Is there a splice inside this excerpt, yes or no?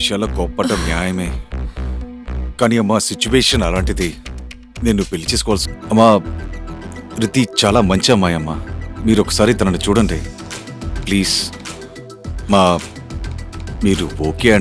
yes